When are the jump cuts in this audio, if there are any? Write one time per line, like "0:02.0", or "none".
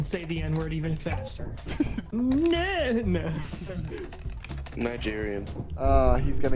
0:02.1